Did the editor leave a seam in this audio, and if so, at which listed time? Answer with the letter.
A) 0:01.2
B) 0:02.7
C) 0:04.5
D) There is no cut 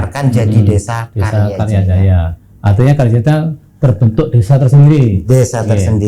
D